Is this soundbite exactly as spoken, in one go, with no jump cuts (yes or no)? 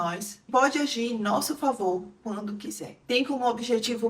no